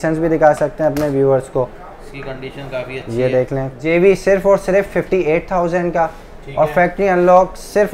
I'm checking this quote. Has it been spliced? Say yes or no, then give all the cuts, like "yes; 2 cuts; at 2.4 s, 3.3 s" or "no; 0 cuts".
yes; 1 cut; at 3.7 s